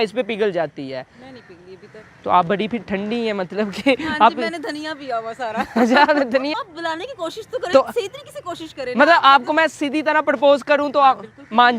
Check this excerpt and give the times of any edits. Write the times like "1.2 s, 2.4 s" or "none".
6.5 s